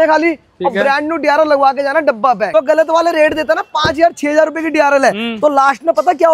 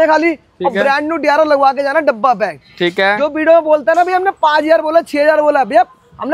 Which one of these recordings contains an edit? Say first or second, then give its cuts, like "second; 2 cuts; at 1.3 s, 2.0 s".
first; 1 cut; at 2.5 s